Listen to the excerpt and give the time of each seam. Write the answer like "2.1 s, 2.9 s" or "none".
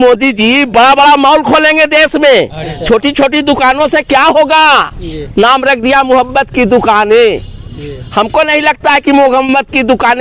none